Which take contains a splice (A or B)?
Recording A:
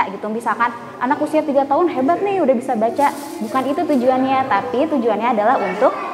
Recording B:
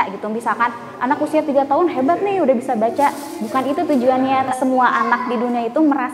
B